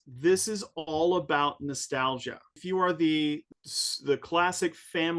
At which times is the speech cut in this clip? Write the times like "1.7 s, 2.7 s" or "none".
2.6 s, 3.5 s